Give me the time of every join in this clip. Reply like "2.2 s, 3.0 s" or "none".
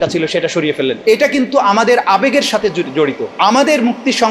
1.0 s, 3.2 s